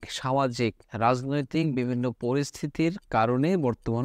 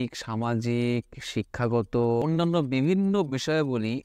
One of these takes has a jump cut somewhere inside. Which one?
second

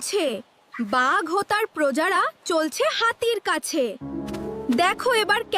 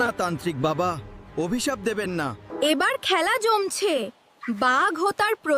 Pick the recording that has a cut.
second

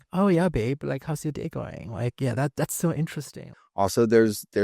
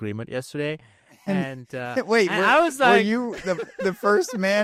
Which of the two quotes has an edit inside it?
first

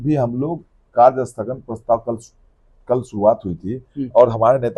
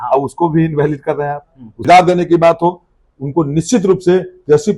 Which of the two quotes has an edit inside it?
second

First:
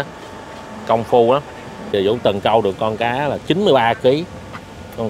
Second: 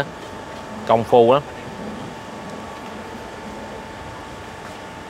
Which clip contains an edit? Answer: first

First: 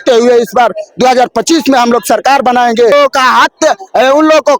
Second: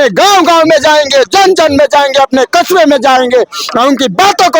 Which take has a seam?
first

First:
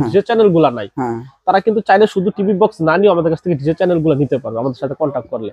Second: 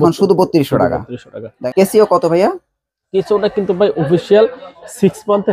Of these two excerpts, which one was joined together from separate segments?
second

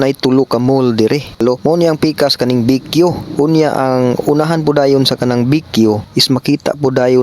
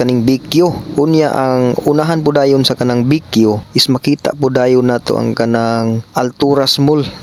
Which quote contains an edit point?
first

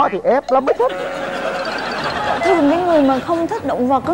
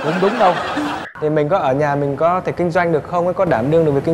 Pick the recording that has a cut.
second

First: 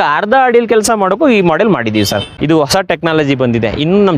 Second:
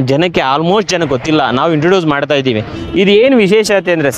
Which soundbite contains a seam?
first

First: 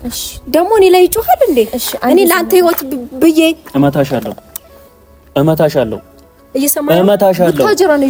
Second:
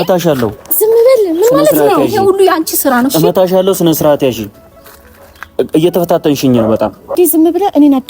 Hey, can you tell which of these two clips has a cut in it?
second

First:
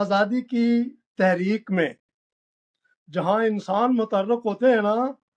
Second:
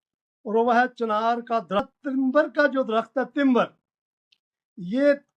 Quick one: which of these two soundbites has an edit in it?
second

